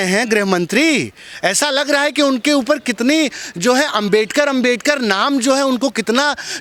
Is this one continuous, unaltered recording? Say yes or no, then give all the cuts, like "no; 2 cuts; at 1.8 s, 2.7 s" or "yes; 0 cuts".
yes; 0 cuts